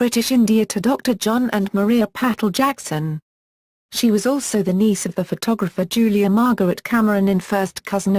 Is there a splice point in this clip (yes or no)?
yes